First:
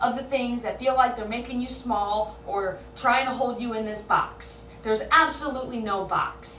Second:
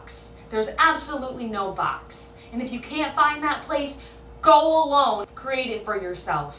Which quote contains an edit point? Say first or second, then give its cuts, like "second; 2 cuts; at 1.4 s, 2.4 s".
second; 1 cut; at 5.3 s